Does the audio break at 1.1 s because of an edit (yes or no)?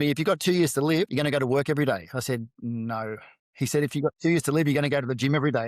yes